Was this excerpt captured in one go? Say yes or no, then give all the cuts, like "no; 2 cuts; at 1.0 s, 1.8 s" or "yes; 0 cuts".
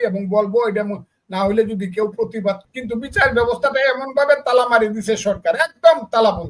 no; 1 cut; at 2.6 s